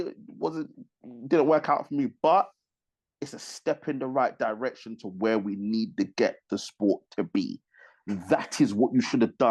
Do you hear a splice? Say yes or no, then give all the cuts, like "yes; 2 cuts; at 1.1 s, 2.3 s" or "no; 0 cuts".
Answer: no; 0 cuts